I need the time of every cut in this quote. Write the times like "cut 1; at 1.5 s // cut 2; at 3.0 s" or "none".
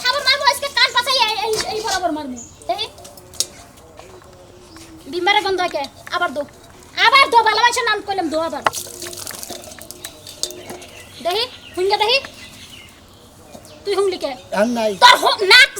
cut 1; at 2.6 s // cut 2; at 8.7 s